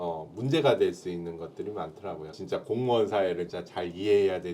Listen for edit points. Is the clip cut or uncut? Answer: cut